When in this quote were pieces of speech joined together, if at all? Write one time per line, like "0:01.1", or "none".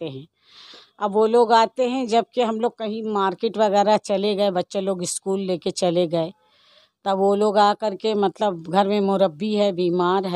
none